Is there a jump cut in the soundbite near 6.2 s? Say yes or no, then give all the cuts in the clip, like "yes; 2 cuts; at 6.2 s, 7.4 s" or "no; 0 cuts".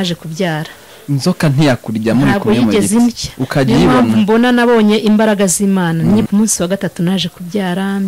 yes; 1 cut; at 6.2 s